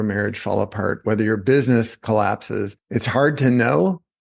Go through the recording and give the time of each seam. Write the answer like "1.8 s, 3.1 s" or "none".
2.8 s